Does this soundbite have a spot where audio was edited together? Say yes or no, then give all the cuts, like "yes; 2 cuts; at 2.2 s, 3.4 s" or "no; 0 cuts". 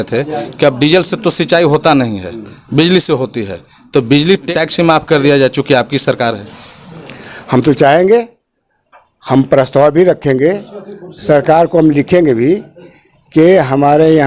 yes; 1 cut; at 4.5 s